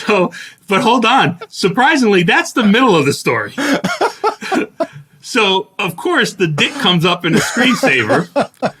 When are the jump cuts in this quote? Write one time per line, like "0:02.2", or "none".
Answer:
none